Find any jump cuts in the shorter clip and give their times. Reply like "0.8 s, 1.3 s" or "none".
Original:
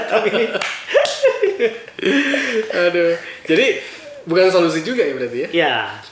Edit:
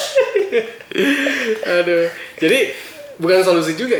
none